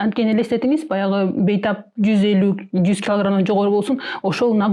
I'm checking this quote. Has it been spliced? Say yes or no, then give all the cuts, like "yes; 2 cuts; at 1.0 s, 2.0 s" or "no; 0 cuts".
no; 0 cuts